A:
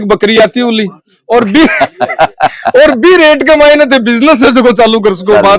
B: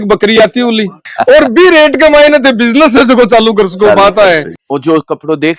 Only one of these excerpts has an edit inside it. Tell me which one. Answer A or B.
B